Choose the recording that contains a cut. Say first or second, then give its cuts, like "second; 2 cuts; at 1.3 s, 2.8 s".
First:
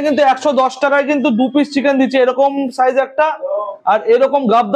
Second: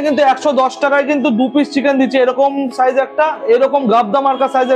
second; 1 cut; at 3.4 s